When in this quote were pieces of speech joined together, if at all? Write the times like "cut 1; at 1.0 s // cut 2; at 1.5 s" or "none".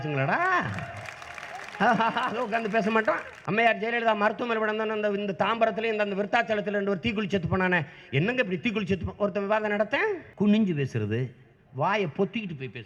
cut 1; at 3.3 s // cut 2; at 10.3 s